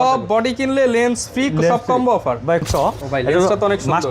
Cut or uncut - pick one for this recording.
cut